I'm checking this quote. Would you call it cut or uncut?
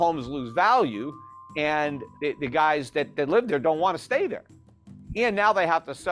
cut